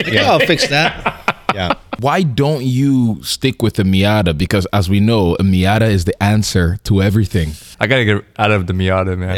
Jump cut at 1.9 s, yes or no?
yes